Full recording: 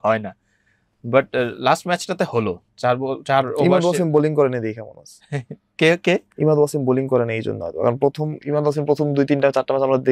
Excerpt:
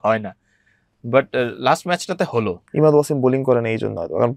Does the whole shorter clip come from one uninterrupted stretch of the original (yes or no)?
no